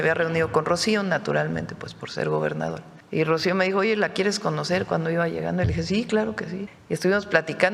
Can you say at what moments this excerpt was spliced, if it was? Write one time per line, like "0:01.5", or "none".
0:02.9
0:06.7